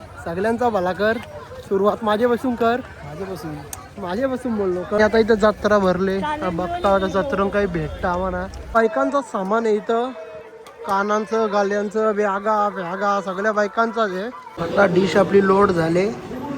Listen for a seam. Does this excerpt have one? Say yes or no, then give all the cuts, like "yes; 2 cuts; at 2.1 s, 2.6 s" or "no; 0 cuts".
yes; 3 cuts; at 5.0 s, 8.6 s, 14.5 s